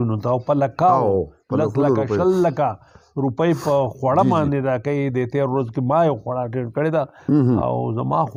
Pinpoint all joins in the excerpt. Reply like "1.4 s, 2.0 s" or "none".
none